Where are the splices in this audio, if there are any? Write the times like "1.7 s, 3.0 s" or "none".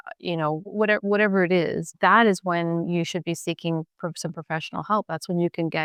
none